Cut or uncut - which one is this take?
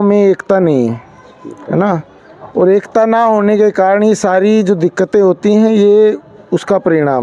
uncut